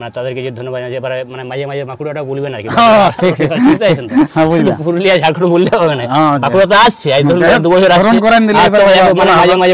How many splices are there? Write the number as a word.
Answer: zero